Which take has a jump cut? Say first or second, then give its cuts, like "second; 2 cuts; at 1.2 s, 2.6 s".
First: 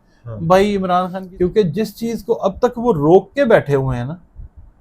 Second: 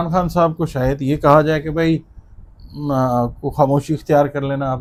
first; 1 cut; at 1.2 s